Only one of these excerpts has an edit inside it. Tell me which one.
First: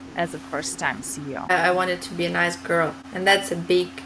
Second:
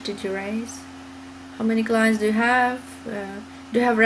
first; 2 cuts; at 1.5 s, 3.0 s

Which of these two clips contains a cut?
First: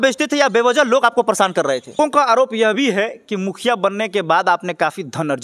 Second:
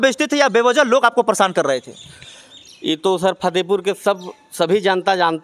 first; 1 cut; at 2.0 s

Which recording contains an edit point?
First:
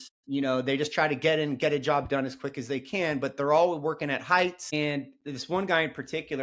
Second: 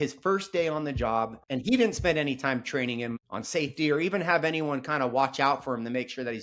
second; 1 cut; at 1.4 s

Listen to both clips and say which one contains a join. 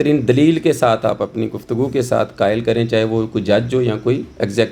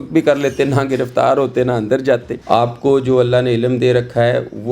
second; 1 cut; at 2.3 s

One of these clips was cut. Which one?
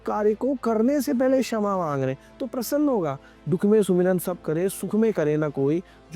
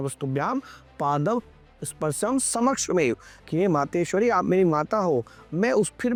first; 1 cut; at 3.4 s

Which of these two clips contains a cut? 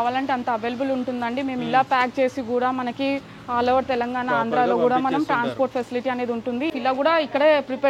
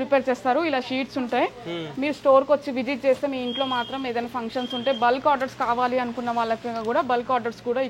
first; 1 cut; at 6.7 s

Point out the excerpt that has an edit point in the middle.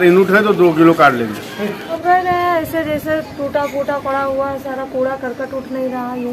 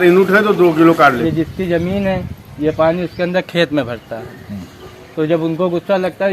second; 1 cut; at 1.2 s

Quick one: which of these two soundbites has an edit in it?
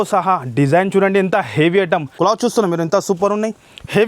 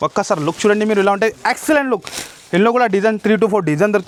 first; 1 cut; at 2.1 s

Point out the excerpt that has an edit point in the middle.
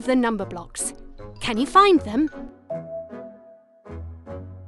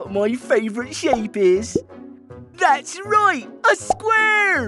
first; 1 cut; at 2.3 s

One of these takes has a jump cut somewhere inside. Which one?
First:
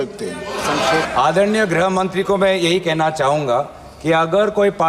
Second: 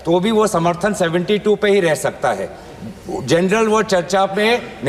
first; 1 cut; at 1.1 s

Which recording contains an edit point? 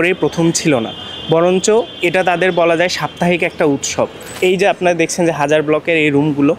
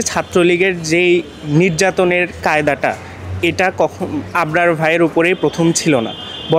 first; 1 cut; at 4.3 s

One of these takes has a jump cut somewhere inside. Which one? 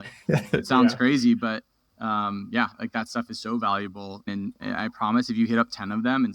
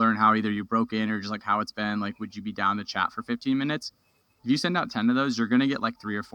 first; 1 cut; at 4.3 s

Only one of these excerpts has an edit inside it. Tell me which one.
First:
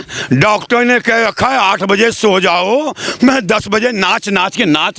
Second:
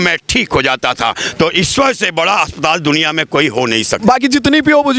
second; 2 cuts; at 1.2 s, 4.0 s

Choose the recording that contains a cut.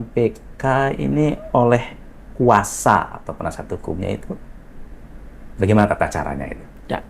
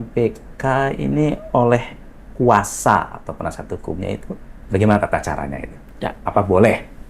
second; 1 cut; at 4.5 s

